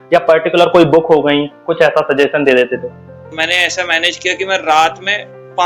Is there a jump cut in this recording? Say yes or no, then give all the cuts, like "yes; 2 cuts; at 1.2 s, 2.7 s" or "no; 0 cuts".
yes; 1 cut; at 3.3 s